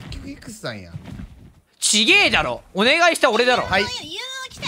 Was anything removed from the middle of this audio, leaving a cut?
no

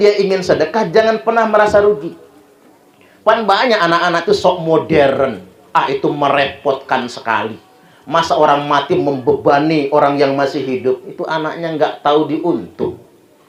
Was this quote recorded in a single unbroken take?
yes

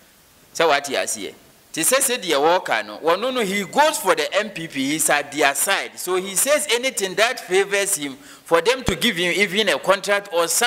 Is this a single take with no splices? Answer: yes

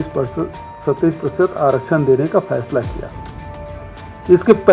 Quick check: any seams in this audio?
no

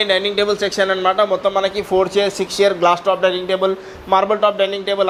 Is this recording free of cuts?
yes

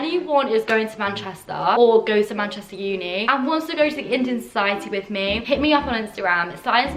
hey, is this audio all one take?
no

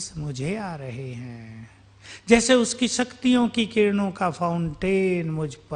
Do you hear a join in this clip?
no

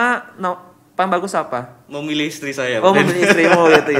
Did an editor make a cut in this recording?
no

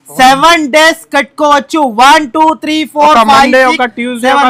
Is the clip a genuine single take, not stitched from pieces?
yes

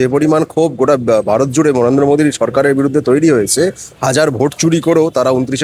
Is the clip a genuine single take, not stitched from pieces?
yes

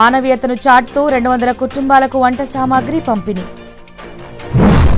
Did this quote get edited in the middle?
no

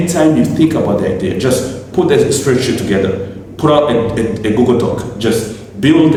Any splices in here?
no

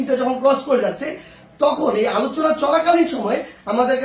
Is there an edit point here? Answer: no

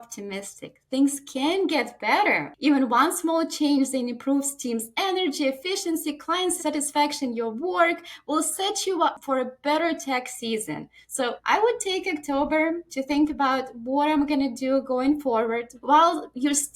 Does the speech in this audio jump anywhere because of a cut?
yes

